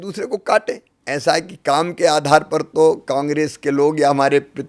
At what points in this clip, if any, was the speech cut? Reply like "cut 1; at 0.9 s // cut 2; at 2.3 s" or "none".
cut 1; at 0.9 s